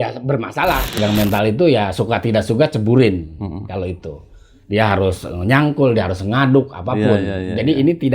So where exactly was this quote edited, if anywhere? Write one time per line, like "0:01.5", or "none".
0:01.0